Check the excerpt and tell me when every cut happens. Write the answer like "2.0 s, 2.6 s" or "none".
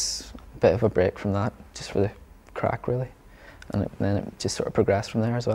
none